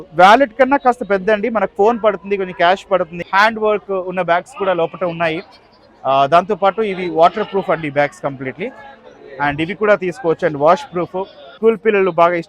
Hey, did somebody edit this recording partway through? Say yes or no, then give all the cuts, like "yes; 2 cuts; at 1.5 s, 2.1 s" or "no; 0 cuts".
yes; 2 cuts; at 3.2 s, 11.5 s